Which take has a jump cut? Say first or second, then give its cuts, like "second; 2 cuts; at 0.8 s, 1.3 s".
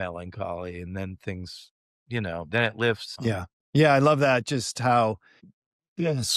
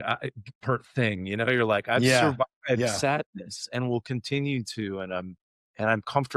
first; 2 cuts; at 3.1 s, 5.4 s